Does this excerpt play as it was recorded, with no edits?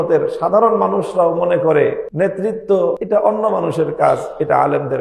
no; 2 cuts; at 2.1 s, 3.0 s

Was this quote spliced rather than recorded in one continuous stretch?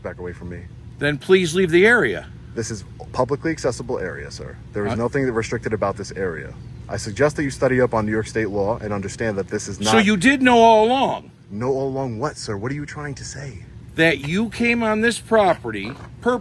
no; 0 cuts

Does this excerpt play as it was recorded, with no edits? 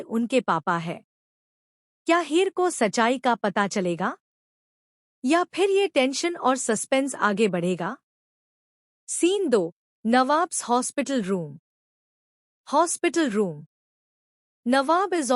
yes; 0 cuts

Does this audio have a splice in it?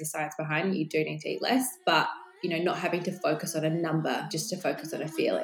yes; 1 cut; at 4.3 s

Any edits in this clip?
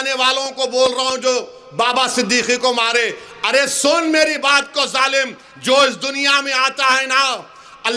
no; 0 cuts

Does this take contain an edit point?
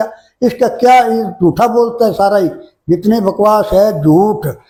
no; 0 cuts

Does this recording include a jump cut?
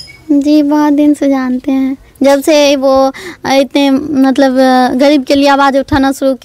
no; 0 cuts

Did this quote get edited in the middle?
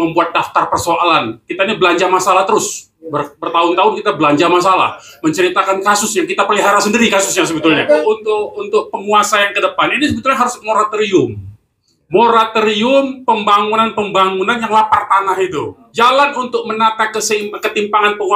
yes; 2 cuts; at 8.0 s, 15.8 s

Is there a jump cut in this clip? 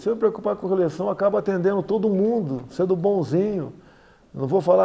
no; 0 cuts

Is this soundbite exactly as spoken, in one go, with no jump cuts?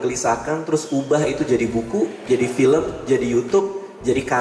yes; 0 cuts

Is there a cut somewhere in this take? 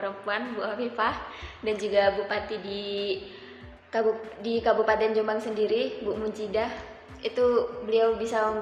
no; 0 cuts

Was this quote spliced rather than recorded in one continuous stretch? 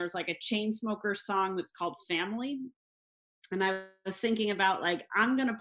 no; 0 cuts

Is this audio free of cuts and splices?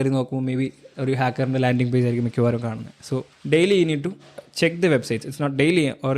no; 1 cut; at 3.3 s

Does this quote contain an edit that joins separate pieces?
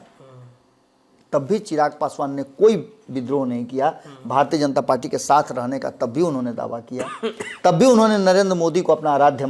no; 0 cuts

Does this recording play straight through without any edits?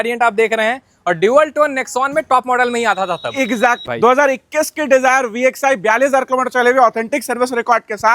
no; 1 cut; at 3.9 s

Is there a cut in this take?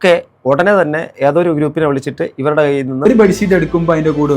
yes; 1 cut; at 3.0 s

